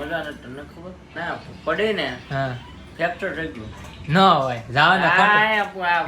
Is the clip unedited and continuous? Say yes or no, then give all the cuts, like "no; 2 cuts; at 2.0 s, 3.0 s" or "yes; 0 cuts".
no; 1 cut; at 1.1 s